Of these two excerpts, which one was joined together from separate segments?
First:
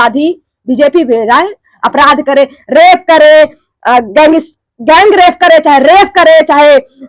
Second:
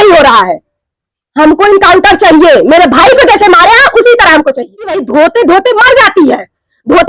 second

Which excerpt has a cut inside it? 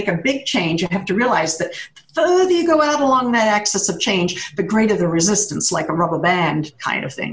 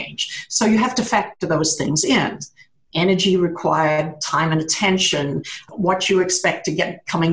second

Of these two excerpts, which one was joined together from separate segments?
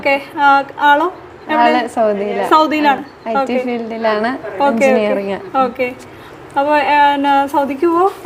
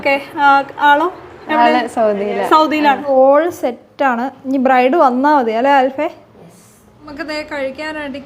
second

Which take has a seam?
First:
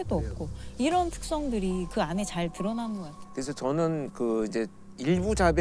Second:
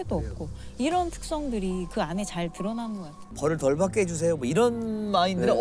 second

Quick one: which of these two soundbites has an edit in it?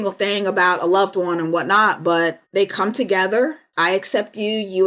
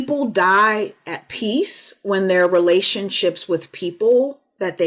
first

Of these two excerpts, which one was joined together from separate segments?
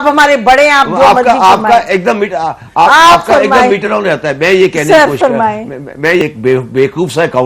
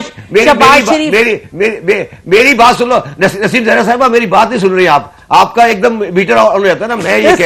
first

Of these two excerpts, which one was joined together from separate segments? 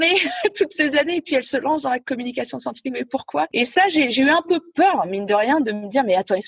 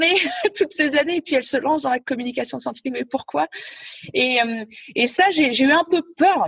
first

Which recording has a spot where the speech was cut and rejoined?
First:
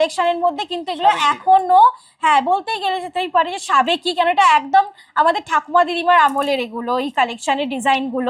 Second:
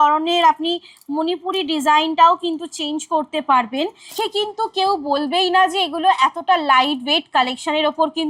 second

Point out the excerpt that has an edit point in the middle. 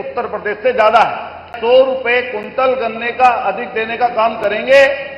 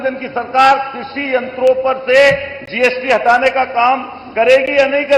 first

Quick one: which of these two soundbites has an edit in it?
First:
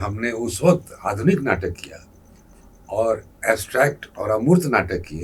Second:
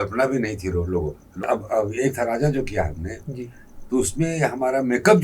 second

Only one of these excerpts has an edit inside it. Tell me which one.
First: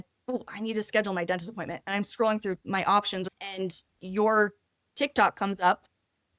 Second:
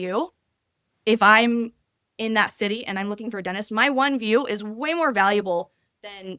first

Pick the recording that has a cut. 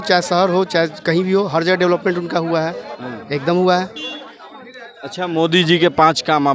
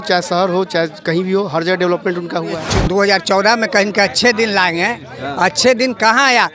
second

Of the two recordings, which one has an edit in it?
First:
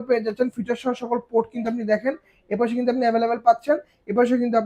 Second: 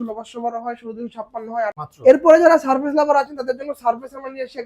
second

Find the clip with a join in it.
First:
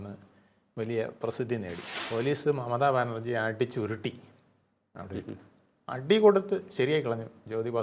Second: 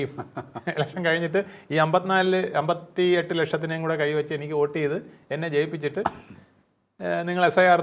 first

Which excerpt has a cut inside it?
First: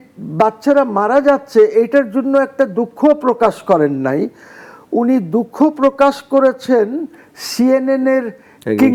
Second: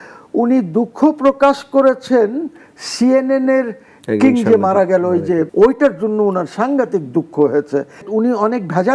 second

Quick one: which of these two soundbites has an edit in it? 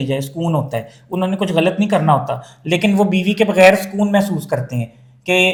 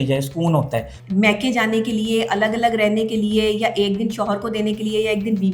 second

